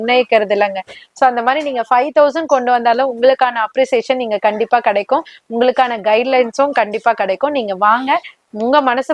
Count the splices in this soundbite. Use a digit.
0